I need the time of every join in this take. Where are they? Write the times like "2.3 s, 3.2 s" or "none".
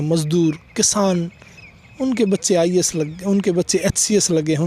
none